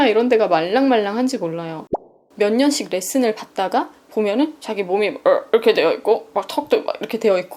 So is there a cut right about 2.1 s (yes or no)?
yes